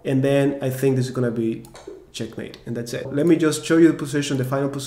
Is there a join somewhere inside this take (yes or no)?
yes